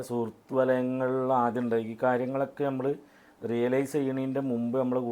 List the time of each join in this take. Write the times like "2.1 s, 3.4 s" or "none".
none